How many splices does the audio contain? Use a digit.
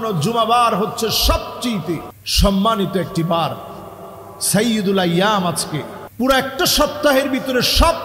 2